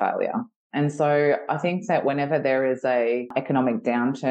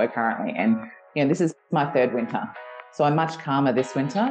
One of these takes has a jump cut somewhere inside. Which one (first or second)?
first